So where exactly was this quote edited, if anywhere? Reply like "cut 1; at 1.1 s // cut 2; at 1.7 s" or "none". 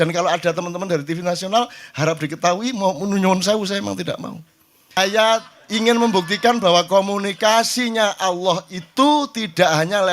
cut 1; at 5.0 s